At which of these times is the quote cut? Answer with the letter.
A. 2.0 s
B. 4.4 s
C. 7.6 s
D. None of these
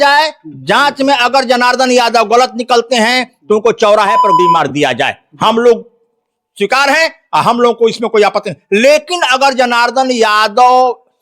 B